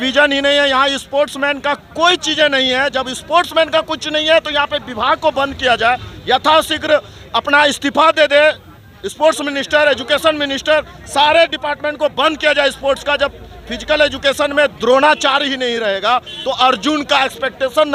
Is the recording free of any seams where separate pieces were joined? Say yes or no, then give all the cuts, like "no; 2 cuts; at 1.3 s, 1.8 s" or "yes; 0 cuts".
yes; 0 cuts